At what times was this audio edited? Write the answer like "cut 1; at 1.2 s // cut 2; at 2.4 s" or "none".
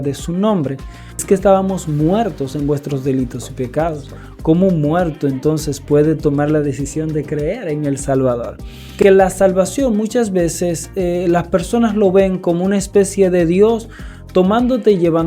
cut 1; at 1.2 s // cut 2; at 9.0 s